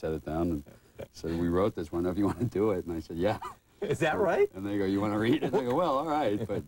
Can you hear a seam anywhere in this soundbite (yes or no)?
no